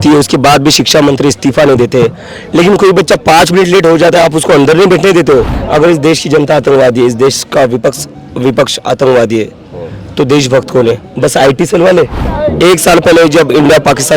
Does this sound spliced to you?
yes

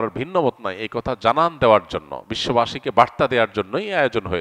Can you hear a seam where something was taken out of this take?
no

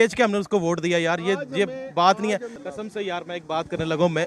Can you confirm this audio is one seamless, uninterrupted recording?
no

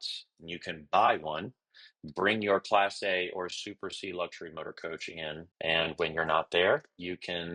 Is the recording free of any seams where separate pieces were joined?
no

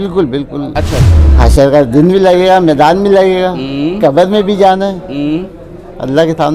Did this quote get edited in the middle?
yes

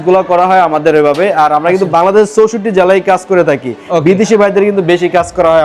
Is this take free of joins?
yes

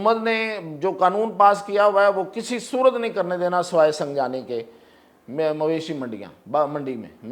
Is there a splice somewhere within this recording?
no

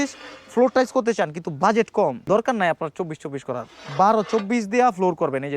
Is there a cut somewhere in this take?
yes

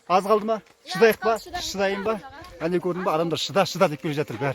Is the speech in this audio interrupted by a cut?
no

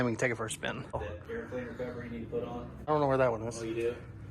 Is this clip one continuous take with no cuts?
no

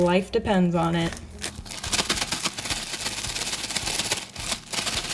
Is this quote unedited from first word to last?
yes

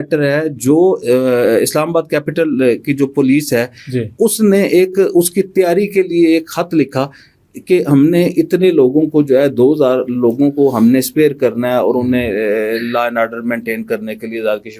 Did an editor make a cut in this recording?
no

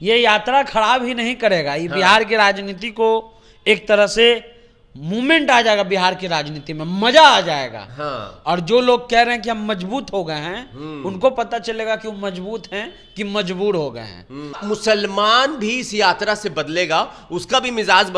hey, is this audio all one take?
no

